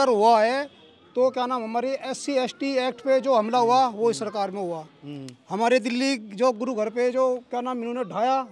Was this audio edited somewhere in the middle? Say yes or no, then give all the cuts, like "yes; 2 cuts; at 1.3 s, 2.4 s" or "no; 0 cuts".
no; 0 cuts